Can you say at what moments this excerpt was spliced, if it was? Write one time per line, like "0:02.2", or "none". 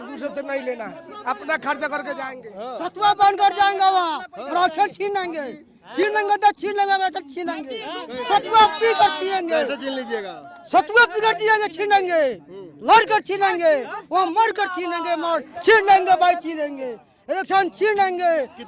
none